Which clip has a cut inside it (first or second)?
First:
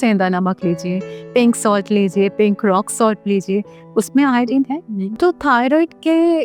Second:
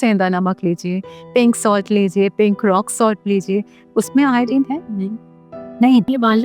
first